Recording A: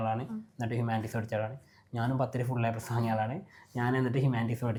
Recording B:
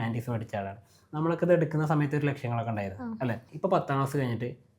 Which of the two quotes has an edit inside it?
B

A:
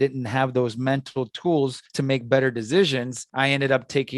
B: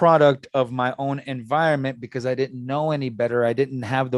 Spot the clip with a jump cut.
A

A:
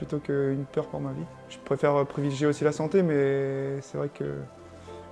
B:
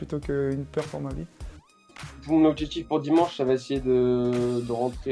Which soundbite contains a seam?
B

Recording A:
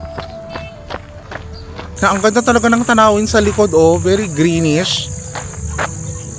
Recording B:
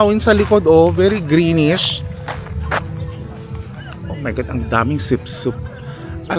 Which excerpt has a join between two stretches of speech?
A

